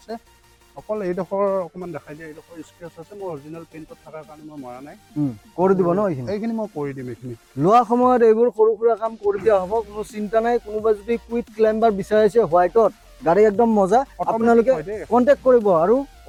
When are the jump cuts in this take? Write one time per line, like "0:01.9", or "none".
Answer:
none

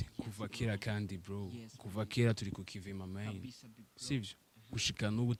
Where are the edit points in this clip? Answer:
none

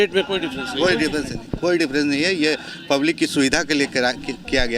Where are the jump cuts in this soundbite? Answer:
none

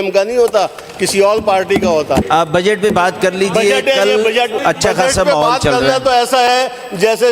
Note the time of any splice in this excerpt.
0:02.3
0:04.6

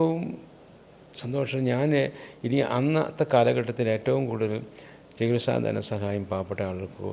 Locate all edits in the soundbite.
none

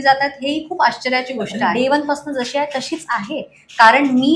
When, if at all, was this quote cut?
0:01.7

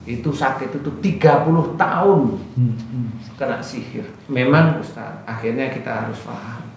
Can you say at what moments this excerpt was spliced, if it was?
0:04.2

